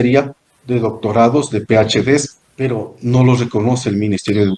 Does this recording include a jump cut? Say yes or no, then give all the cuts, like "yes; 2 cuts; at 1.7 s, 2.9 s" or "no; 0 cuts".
yes; 1 cut; at 2.4 s